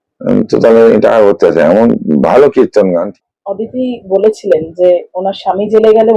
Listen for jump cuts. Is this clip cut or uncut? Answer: cut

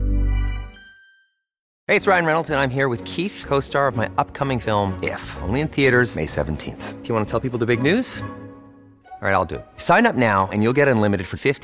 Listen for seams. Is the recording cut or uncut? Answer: cut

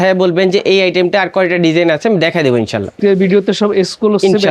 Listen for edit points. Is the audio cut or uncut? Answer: cut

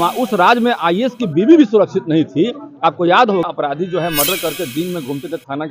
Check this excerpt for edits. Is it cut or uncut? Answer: cut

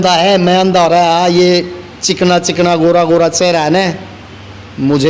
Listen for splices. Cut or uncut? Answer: uncut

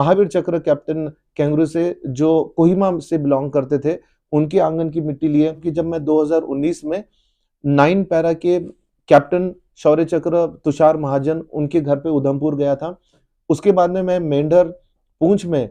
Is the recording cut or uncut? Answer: cut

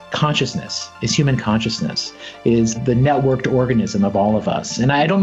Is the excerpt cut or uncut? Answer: cut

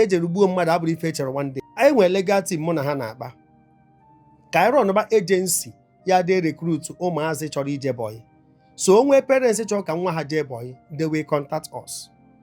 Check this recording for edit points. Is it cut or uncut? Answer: cut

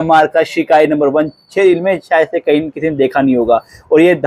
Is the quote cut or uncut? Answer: uncut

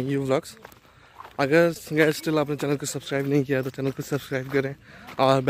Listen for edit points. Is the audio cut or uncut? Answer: uncut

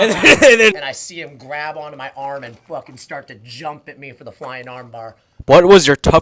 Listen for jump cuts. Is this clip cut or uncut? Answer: cut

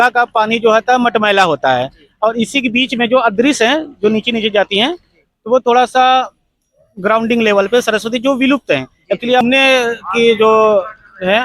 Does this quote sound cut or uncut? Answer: cut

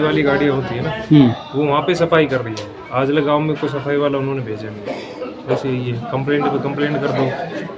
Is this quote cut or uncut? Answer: uncut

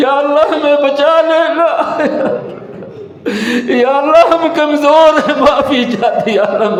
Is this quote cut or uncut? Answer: uncut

